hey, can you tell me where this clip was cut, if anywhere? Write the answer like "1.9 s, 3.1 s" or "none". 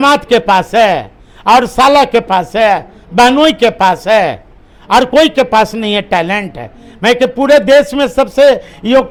none